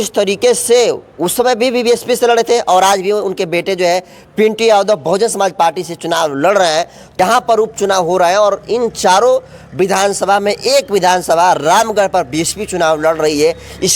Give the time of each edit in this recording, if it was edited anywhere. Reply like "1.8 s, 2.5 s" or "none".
7.0 s